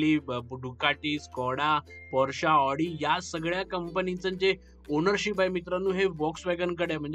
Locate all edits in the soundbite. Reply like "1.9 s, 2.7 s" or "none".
none